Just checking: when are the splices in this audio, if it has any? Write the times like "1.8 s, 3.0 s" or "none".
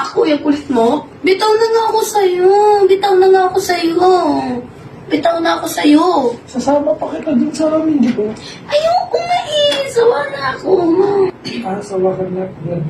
1.1 s, 11.3 s